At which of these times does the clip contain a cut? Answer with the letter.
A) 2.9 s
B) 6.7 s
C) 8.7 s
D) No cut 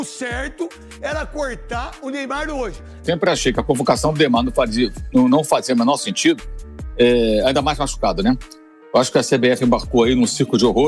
A